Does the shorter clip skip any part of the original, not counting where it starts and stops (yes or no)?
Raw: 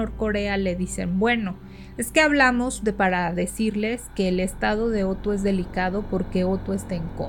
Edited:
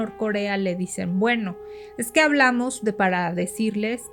no